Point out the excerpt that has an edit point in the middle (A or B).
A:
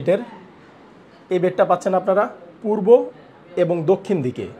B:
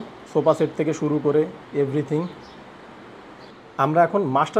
B